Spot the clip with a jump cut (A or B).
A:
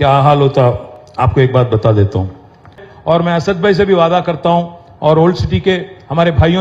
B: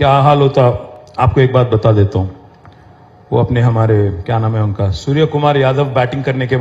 A